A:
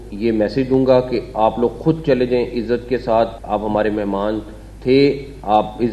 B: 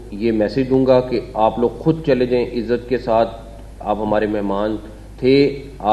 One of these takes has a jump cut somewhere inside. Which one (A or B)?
A